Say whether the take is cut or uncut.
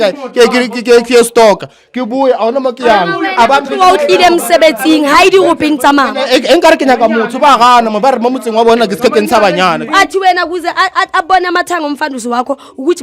cut